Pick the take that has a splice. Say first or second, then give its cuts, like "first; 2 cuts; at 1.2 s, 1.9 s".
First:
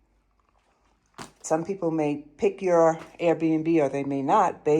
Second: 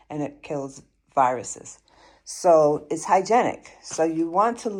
first; 1 cut; at 1.4 s